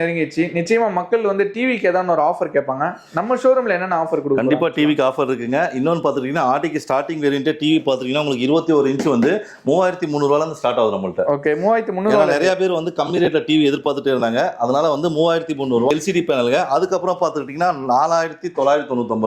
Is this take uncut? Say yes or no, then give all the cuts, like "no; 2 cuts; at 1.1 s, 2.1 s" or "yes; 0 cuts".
yes; 0 cuts